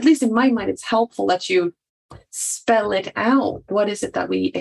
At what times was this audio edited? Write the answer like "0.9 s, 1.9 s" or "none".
3.6 s